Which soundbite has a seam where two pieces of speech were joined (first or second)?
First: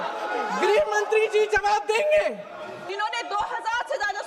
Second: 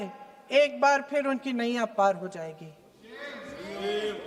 first